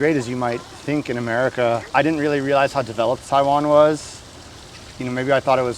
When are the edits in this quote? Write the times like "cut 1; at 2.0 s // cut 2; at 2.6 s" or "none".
cut 1; at 1.8 s

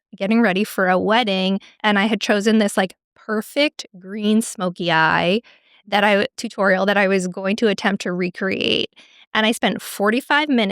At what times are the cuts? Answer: cut 1; at 1.8 s

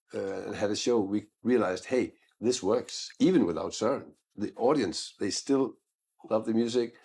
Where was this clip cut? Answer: none

